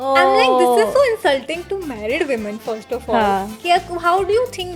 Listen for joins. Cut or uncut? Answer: uncut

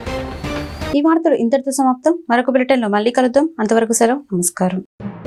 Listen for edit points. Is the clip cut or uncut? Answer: uncut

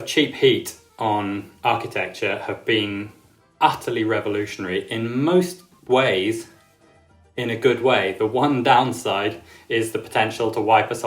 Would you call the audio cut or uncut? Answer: uncut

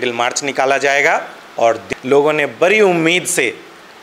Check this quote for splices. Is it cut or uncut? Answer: cut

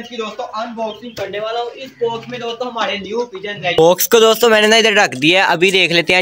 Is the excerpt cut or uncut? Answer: cut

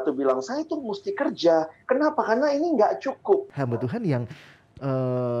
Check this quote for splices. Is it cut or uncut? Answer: cut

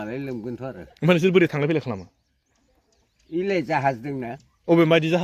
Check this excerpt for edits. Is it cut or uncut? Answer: uncut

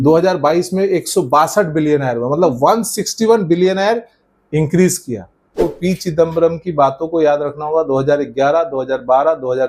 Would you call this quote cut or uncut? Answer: cut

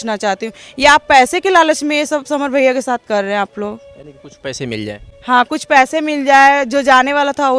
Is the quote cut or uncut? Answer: uncut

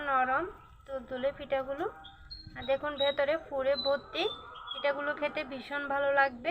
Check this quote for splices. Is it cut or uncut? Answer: uncut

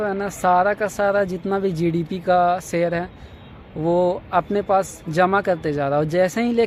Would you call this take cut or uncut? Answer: uncut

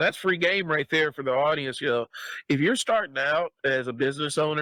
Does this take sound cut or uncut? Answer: uncut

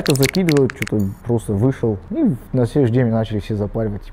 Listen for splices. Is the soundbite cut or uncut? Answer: cut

